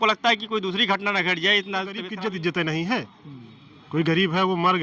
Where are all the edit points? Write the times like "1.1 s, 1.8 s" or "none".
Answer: 2.1 s